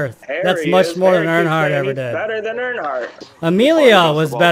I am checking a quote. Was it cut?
yes; 1 cut; at 3.2 s

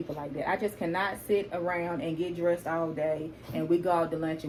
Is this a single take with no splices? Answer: yes; 0 cuts

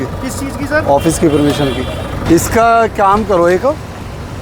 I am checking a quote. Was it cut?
yes; 1 cut; at 2.2 s

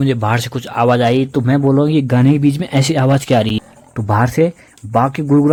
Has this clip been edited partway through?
no; 0 cuts

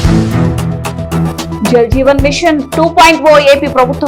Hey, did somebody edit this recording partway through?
yes; 1 cut; at 1.5 s

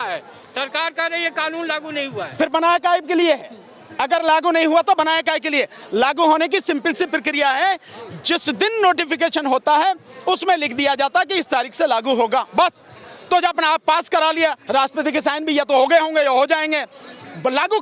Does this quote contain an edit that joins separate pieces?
no; 0 cuts

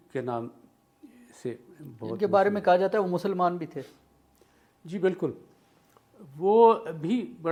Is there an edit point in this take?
no; 0 cuts

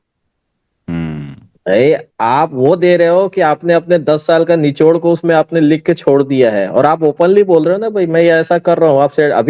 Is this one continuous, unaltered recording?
yes; 0 cuts

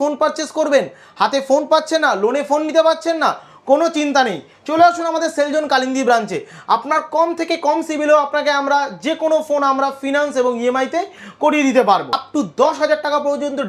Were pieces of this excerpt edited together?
yes; 1 cut; at 12.2 s

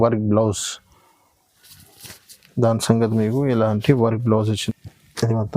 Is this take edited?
yes; 1 cut; at 4.6 s

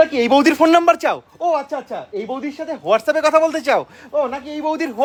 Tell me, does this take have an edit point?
no; 0 cuts

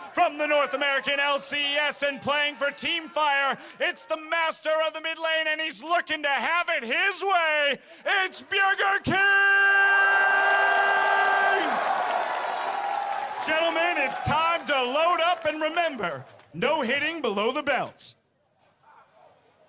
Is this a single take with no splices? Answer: yes; 0 cuts

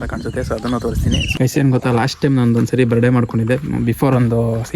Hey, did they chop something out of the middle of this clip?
yes; 1 cut; at 1.3 s

